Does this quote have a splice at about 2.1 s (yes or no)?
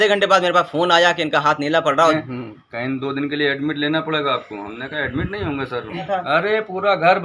yes